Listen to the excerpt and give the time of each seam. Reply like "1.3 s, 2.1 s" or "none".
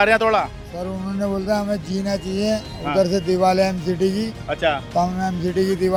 none